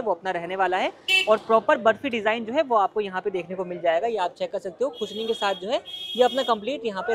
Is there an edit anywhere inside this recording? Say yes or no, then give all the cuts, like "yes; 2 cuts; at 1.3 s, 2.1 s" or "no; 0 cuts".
no; 0 cuts